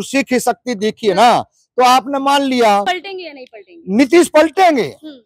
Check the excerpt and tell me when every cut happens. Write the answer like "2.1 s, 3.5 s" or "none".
2.9 s